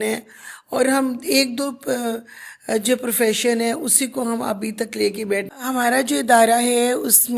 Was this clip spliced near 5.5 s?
yes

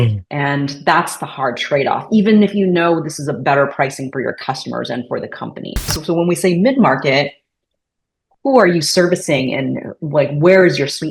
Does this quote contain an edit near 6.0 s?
yes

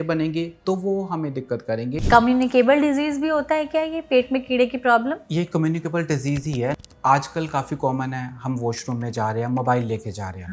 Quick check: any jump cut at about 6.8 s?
yes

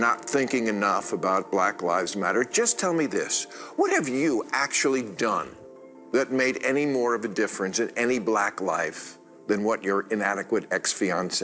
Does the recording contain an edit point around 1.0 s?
yes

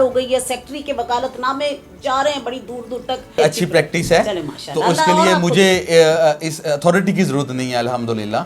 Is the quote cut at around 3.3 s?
yes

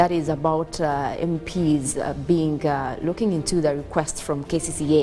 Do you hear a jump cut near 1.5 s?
yes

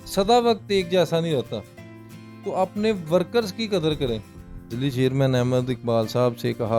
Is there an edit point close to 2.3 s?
no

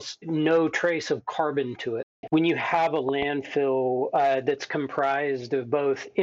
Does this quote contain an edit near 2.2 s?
yes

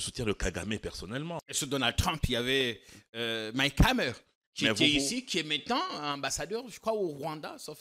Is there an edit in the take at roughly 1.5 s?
yes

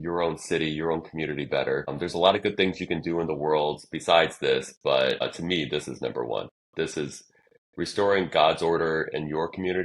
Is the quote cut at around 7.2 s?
no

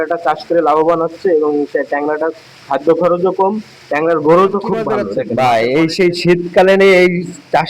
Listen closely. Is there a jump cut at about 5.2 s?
yes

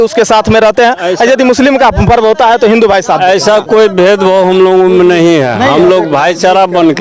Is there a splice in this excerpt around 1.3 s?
no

